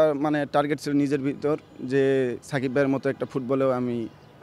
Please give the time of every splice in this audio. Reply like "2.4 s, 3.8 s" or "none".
none